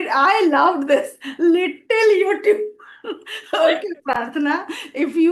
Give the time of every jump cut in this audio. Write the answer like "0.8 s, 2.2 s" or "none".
none